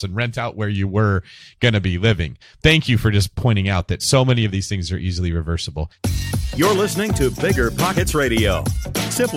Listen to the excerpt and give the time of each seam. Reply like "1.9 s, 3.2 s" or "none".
2.4 s, 4.0 s, 5.9 s